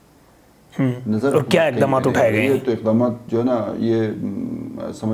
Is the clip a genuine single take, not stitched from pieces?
yes; 0 cuts

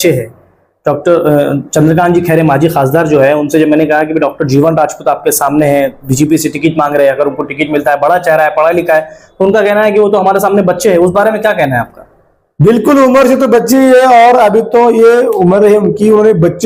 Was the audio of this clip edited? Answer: no; 0 cuts

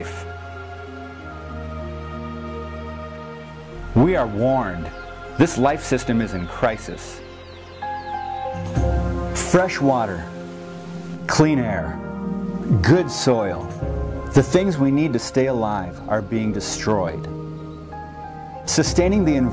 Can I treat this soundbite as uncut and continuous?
yes; 0 cuts

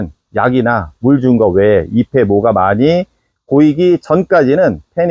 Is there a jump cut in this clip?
no; 0 cuts

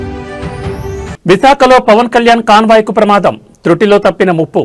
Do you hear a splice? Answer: no; 0 cuts

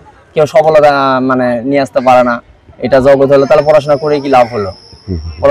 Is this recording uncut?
yes; 0 cuts

